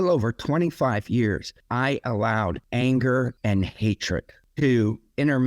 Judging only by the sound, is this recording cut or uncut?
cut